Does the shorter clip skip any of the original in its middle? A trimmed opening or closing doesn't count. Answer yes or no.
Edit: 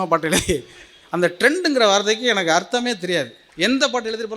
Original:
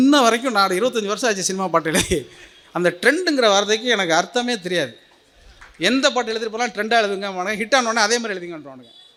yes